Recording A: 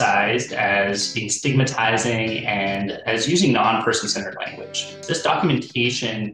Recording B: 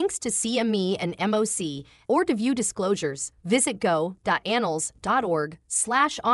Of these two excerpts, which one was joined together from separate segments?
A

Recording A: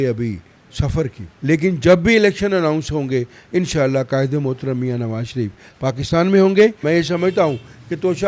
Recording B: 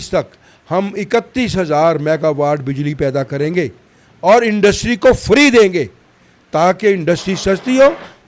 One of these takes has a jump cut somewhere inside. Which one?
A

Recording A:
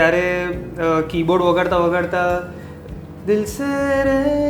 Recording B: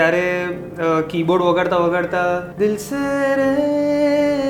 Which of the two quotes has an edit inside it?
B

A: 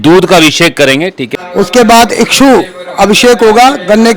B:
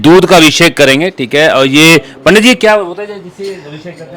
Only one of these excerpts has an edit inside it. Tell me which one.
A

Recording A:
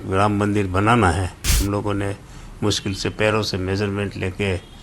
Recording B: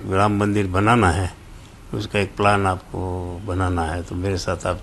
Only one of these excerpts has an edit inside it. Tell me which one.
A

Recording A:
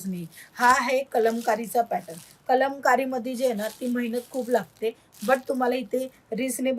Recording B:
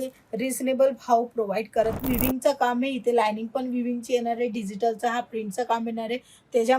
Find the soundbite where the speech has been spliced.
B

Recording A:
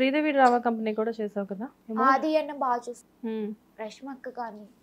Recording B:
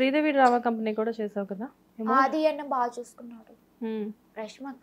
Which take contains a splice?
A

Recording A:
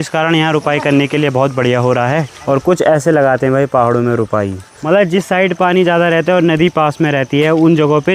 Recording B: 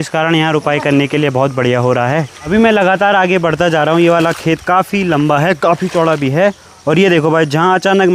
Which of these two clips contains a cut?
A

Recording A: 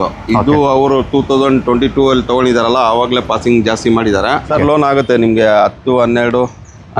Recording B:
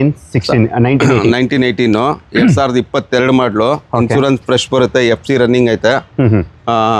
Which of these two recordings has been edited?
A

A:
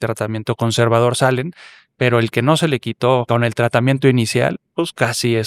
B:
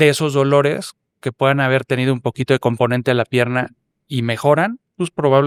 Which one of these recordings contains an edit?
A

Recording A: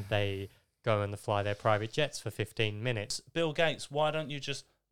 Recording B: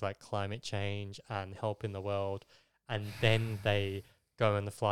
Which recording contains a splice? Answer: A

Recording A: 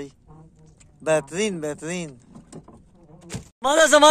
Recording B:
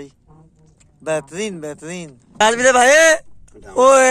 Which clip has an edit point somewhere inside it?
B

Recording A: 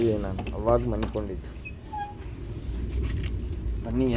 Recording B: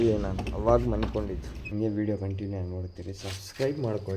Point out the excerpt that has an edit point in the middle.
B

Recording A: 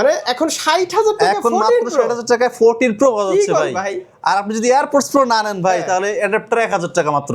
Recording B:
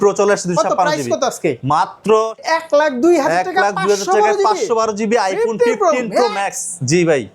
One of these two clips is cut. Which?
B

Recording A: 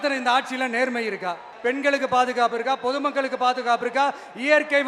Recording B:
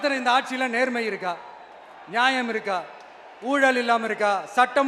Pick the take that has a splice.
A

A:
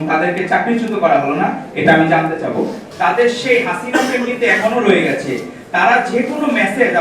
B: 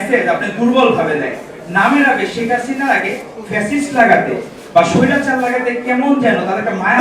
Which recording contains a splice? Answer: A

